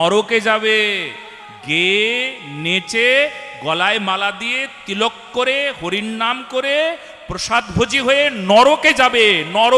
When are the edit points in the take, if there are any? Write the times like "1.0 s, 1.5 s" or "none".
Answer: none